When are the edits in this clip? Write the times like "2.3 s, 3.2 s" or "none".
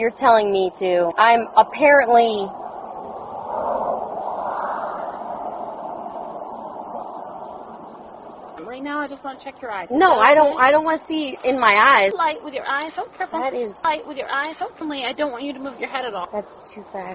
1.1 s, 8.6 s, 12.1 s, 14.8 s, 16.2 s